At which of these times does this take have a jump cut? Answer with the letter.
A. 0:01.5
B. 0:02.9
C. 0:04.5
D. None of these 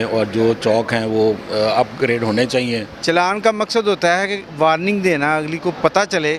B